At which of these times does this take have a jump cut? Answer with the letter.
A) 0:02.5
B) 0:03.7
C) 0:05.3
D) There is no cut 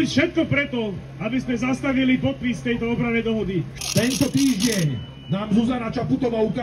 B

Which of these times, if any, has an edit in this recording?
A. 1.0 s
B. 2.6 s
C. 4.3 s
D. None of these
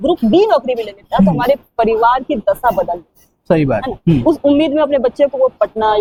D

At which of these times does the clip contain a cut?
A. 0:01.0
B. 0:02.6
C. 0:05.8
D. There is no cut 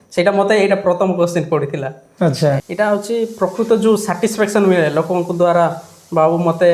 B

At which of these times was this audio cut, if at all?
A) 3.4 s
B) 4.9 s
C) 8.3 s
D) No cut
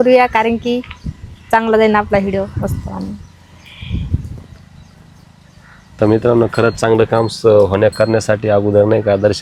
D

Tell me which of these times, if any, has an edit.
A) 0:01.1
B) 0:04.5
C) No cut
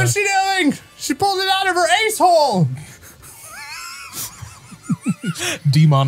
C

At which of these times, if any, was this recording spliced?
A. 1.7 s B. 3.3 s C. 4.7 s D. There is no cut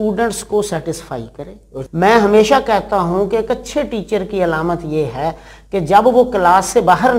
A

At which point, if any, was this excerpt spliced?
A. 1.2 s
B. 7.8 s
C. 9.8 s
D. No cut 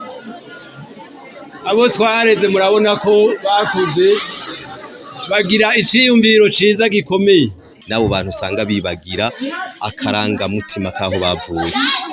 B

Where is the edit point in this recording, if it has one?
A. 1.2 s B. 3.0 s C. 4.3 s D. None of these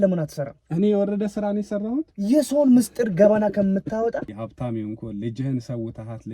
C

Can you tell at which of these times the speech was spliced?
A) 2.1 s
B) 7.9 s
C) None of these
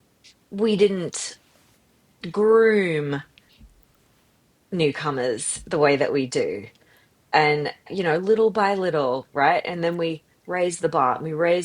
B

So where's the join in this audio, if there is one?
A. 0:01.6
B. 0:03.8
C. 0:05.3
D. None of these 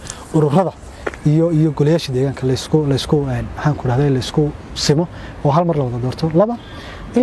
D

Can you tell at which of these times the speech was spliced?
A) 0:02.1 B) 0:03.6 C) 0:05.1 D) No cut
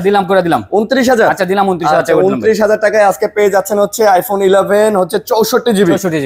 D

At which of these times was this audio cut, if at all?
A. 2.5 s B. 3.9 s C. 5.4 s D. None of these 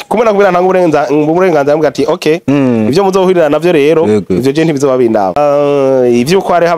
C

